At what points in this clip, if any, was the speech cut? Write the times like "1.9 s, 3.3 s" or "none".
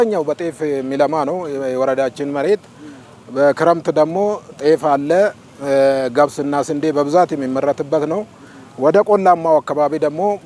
none